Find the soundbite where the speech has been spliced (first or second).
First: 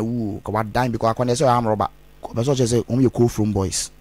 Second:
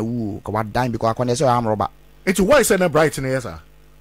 first